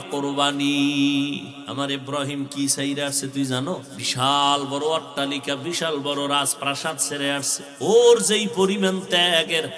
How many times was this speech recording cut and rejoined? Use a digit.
3